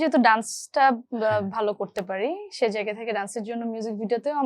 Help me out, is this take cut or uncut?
uncut